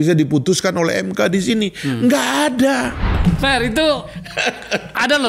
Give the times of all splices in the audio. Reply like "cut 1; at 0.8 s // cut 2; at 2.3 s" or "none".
cut 1; at 3.1 s